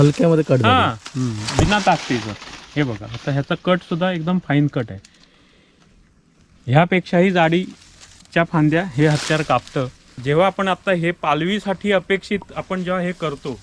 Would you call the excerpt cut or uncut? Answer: cut